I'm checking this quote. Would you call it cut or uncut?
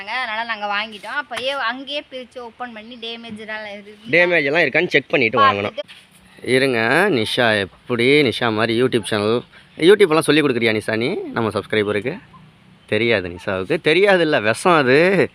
cut